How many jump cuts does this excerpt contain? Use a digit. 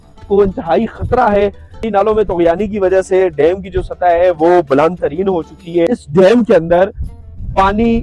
2